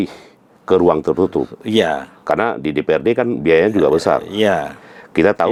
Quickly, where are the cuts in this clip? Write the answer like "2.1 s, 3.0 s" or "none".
none